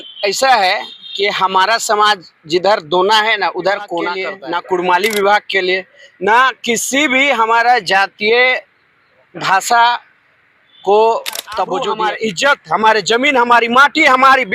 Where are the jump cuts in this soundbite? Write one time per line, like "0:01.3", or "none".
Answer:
0:04.3
0:11.9